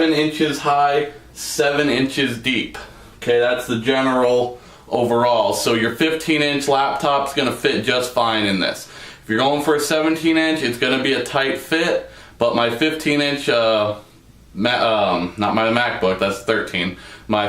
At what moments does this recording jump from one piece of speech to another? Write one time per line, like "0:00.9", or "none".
0:01.6